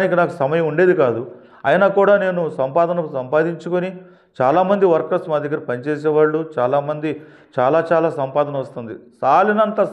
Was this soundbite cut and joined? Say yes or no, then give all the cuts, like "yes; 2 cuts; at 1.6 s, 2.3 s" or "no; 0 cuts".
no; 0 cuts